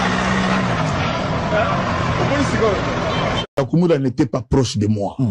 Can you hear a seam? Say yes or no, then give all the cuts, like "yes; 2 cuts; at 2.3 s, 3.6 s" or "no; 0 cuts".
no; 0 cuts